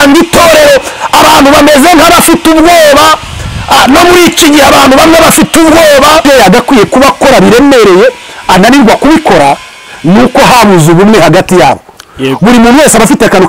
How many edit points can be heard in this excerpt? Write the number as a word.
one